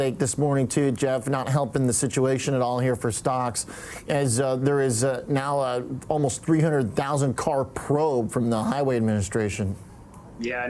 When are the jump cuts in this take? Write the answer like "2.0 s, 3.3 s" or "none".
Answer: none